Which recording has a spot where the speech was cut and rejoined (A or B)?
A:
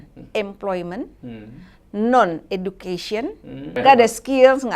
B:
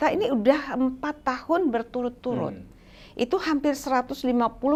A